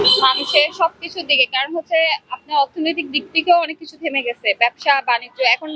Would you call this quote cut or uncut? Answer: uncut